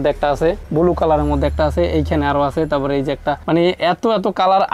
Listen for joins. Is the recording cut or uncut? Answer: uncut